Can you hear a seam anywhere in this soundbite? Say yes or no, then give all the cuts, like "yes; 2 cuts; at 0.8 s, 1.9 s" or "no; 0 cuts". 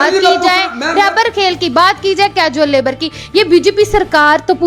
no; 0 cuts